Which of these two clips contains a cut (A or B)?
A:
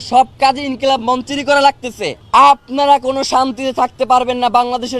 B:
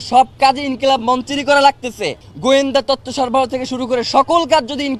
A